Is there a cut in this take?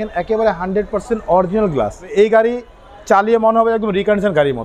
yes; 1 cut; at 2.1 s

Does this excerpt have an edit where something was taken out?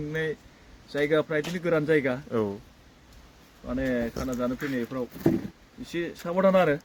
no; 0 cuts

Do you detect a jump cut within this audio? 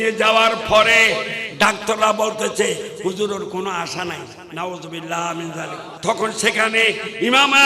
yes; 1 cut; at 5.9 s

